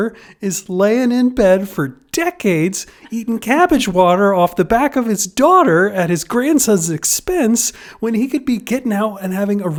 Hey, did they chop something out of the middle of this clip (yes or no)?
no